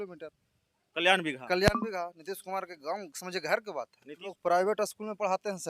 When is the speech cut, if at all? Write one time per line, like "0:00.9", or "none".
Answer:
0:04.3